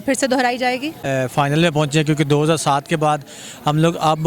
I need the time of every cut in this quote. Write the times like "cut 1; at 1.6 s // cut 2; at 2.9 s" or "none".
cut 1; at 1.0 s

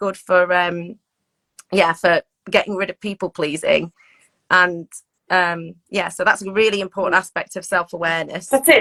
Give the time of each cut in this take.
none

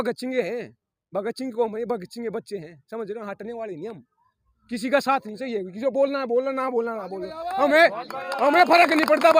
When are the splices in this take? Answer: none

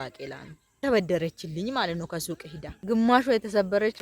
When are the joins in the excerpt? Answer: cut 1; at 2.8 s

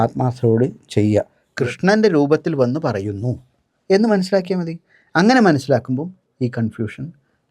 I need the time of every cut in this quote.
cut 1; at 1.4 s

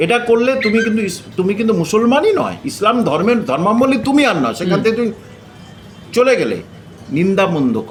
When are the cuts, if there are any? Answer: none

